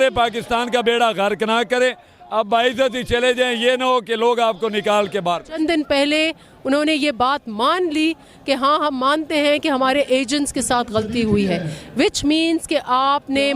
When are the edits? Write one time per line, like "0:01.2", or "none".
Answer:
0:05.6

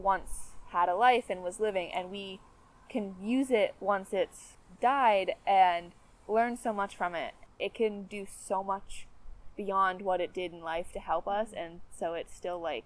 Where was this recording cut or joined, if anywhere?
0:07.4

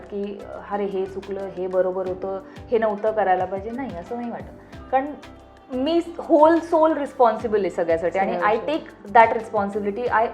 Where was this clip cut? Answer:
none

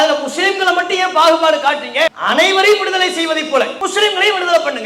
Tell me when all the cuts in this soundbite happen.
0:02.2
0:03.8

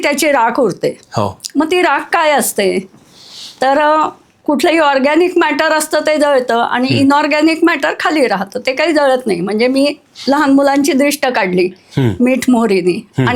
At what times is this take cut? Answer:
none

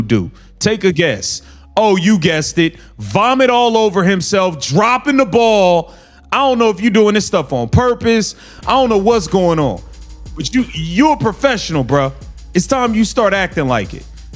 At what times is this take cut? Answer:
none

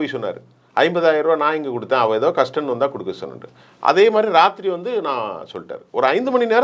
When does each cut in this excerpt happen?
none

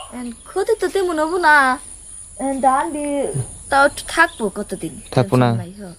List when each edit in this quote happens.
0:03.6

